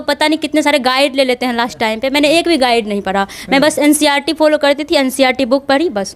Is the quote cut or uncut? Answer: uncut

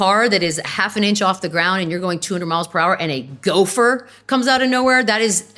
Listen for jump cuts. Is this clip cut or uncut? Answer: uncut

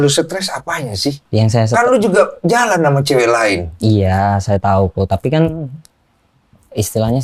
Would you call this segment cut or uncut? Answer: cut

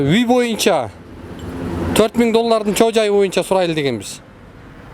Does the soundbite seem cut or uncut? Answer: uncut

